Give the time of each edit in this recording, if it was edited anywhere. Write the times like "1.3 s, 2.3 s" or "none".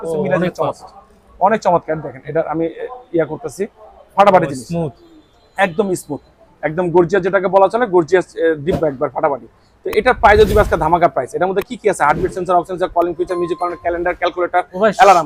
none